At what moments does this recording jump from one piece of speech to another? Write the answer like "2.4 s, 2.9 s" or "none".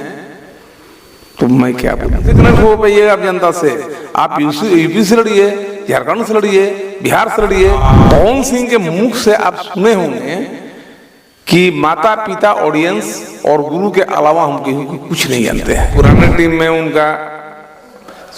2.4 s, 7.8 s, 15.9 s